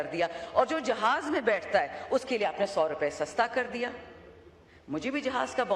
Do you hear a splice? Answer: no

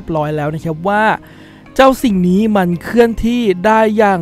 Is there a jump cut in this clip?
no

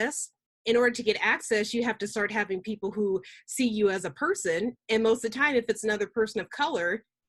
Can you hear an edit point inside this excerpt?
no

